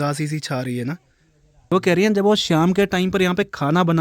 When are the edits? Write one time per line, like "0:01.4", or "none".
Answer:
0:01.7